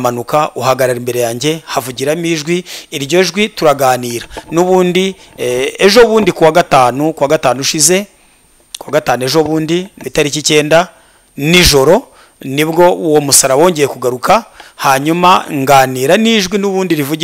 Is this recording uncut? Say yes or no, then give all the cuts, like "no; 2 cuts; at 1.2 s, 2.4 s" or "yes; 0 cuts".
no; 1 cut; at 10.0 s